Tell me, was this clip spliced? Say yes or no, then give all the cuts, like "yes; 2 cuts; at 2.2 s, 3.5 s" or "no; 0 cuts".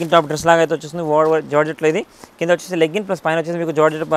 no; 0 cuts